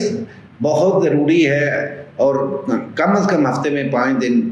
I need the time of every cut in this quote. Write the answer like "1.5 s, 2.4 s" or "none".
none